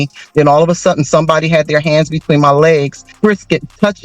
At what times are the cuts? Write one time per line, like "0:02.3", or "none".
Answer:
0:03.0